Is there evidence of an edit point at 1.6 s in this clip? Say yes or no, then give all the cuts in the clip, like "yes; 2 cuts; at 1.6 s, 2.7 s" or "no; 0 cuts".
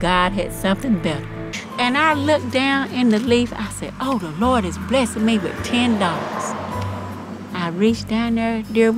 yes; 1 cut; at 1.6 s